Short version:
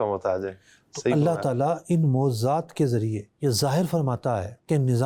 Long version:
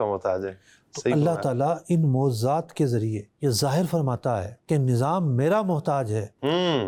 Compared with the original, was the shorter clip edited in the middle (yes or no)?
no